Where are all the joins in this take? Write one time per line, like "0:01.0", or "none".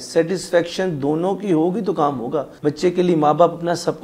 0:02.5